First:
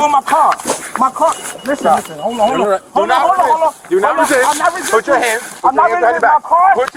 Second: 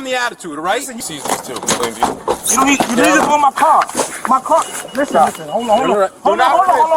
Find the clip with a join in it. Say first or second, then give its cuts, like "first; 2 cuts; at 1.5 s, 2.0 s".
second; 1 cut; at 1.0 s